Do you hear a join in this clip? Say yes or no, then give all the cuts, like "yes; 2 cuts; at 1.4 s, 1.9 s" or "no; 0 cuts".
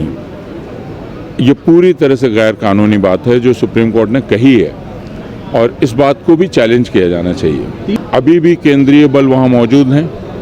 yes; 1 cut; at 8.0 s